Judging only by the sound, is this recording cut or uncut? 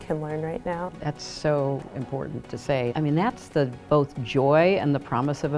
cut